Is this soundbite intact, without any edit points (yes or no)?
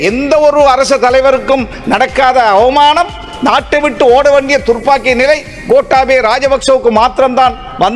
yes